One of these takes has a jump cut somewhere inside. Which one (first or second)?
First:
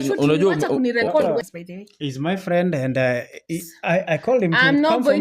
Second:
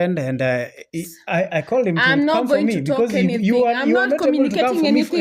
first